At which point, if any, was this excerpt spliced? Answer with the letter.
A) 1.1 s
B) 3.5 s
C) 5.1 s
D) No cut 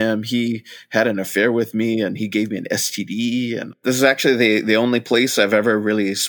B